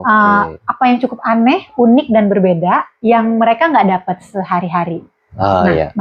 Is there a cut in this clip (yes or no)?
no